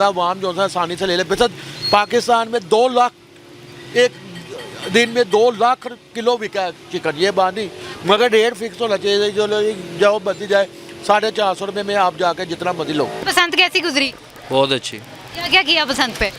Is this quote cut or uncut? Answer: uncut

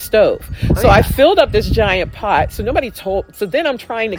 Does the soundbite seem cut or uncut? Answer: uncut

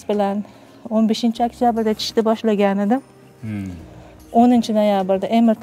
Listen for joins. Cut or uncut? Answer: uncut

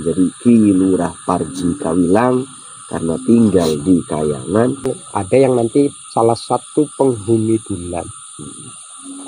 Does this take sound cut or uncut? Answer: cut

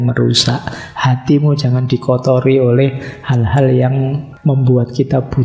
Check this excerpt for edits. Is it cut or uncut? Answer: cut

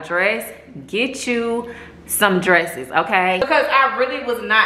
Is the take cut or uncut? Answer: cut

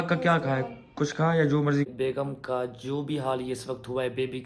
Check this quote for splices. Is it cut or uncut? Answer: cut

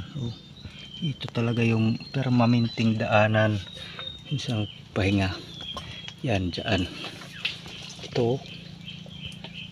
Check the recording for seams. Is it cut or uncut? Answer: uncut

